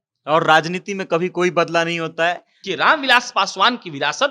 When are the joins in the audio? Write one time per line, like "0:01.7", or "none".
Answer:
0:02.6

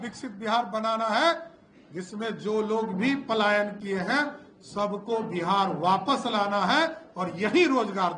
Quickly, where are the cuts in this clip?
none

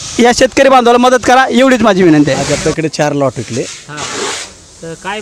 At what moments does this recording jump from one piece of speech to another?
0:02.4

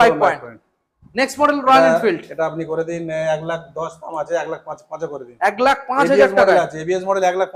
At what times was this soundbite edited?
none

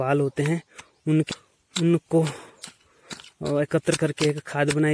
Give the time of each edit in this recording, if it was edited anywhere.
0:01.3

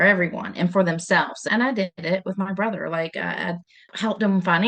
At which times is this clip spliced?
0:01.5
0:03.8

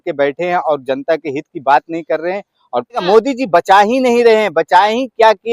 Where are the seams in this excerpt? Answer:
0:03.0

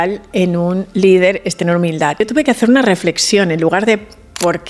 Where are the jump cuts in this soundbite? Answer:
0:02.2

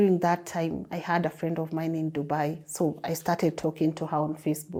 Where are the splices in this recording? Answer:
none

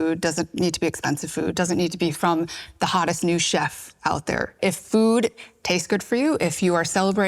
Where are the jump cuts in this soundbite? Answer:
0:04.6

